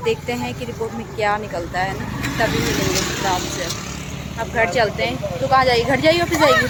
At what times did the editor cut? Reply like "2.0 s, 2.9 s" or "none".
none